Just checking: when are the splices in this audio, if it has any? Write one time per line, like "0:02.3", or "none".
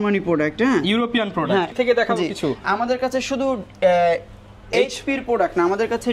0:01.7